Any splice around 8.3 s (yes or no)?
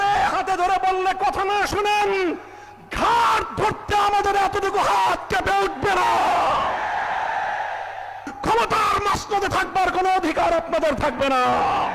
yes